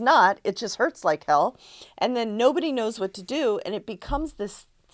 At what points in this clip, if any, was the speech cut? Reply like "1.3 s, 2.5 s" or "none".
none